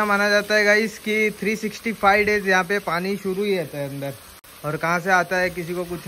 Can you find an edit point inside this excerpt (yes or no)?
no